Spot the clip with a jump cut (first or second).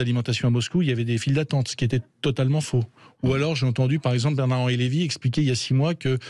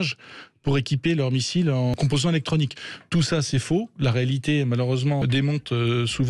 second